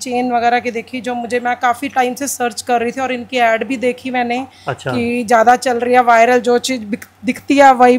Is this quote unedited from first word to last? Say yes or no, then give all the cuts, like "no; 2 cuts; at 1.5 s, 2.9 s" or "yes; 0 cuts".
yes; 0 cuts